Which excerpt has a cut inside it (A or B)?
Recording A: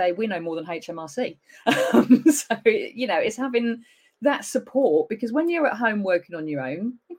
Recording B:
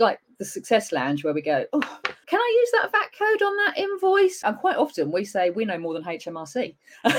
B